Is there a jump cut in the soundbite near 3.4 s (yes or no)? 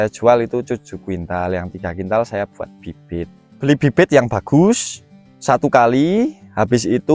yes